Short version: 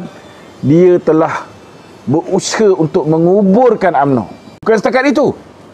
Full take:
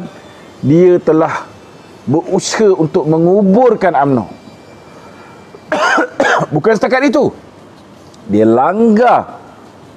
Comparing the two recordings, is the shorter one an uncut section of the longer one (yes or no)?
no